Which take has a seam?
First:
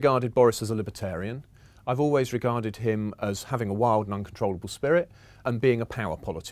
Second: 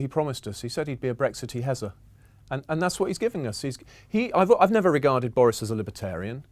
first; 1 cut; at 5.4 s

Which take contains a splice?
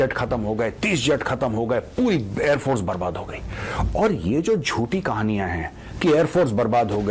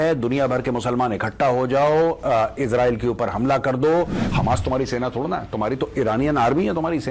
second; 1 cut; at 4.2 s

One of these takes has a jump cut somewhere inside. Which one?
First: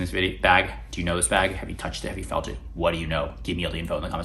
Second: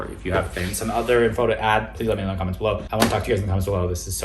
second; 1 cut; at 2.9 s

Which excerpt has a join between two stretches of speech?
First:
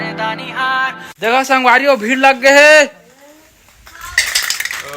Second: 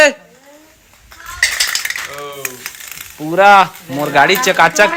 first; 1 cut; at 1.2 s

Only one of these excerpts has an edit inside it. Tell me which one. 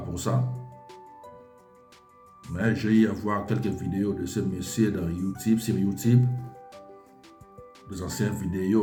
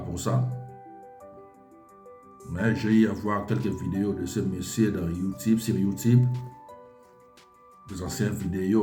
second; 2 cuts; at 6.4 s, 7.8 s

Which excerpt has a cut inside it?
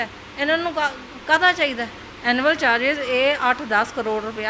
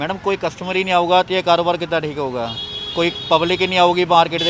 first; 1 cut; at 2.0 s

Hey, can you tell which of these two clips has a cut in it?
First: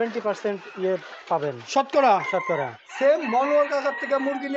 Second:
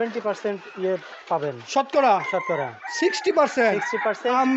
first; 1 cut; at 2.9 s

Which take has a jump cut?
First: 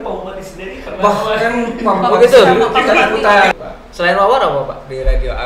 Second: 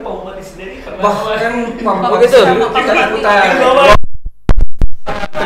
first; 1 cut; at 3.5 s

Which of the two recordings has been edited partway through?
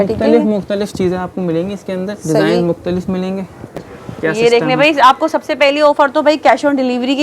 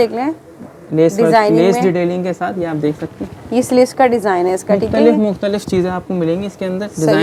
first; 1 cut; at 3.8 s

